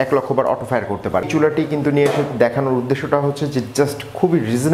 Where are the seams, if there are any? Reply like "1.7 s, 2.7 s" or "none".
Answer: 1.3 s